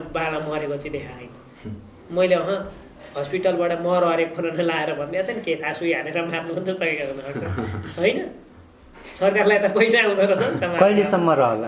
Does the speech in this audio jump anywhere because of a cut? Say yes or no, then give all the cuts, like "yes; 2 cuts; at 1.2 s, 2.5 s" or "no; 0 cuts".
no; 0 cuts